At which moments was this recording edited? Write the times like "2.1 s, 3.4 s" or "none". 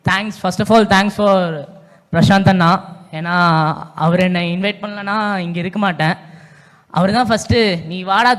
none